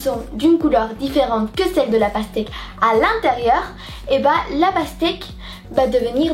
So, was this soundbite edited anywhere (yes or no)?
no